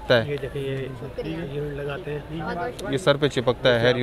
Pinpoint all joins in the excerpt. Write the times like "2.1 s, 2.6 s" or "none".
none